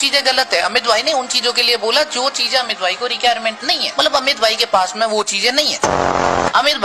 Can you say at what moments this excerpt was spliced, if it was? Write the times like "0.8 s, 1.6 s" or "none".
none